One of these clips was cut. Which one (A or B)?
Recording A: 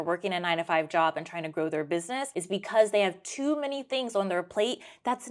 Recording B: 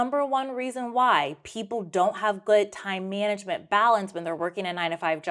A